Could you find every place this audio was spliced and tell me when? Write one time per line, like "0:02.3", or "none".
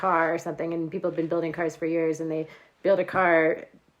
none

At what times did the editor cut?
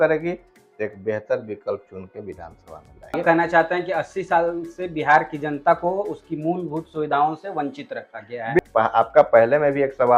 0:03.1
0:08.6

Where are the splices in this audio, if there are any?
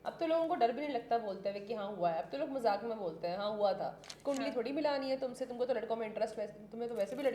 0:04.1

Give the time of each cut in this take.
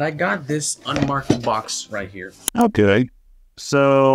0:02.4

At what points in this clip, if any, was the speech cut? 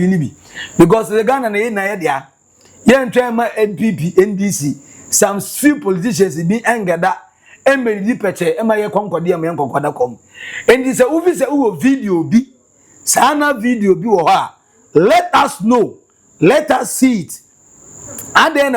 none

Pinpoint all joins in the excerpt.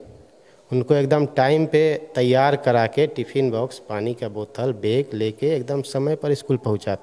none

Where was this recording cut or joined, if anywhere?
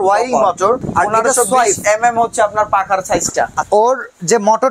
0:00.9
0:03.6

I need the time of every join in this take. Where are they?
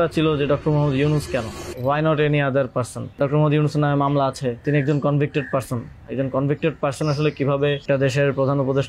0:01.6
0:03.2
0:04.6
0:07.8

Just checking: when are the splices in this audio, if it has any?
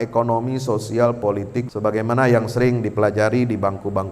0:01.7

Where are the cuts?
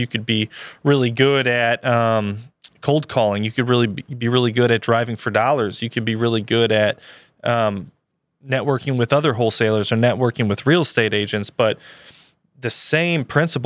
none

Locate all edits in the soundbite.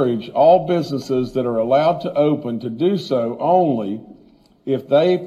none

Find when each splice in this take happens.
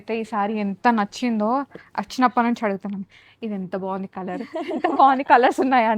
none

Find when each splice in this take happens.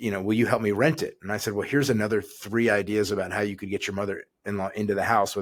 none

